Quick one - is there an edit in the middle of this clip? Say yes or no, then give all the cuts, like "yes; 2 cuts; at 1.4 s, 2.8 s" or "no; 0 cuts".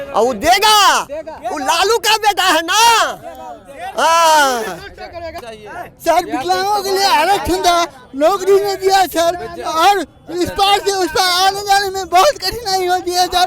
yes; 1 cut; at 5.5 s